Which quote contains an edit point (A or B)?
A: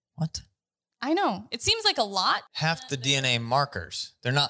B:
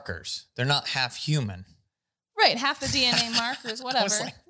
A